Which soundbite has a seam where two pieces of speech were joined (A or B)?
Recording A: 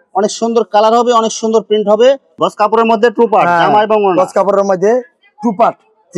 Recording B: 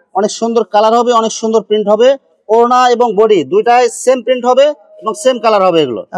A